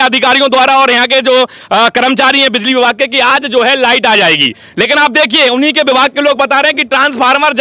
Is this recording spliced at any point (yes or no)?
no